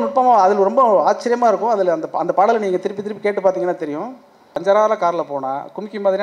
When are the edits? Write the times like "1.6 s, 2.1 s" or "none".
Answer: 4.6 s